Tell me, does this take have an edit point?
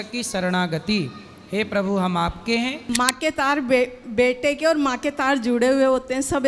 yes; 1 cut; at 2.8 s

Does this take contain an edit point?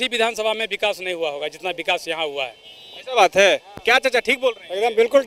no; 0 cuts

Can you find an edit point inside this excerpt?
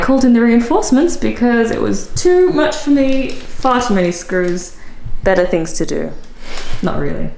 no; 0 cuts

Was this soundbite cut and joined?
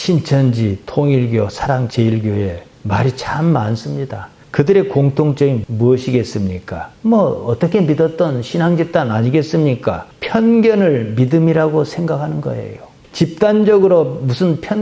no; 0 cuts

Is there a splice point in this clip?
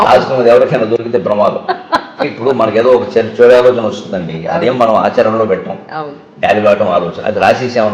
no; 0 cuts

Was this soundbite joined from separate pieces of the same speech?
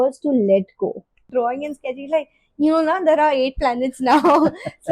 yes; 1 cut; at 1.2 s

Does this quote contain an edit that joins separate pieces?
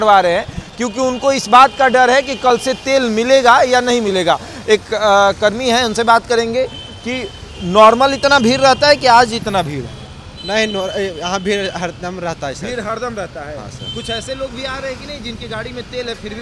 no; 0 cuts

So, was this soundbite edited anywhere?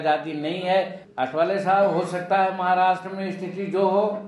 yes; 1 cut; at 1.0 s

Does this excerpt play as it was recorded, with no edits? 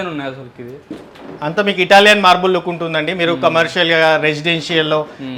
yes; 0 cuts

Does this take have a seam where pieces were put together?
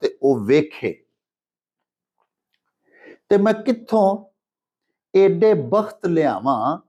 no; 0 cuts

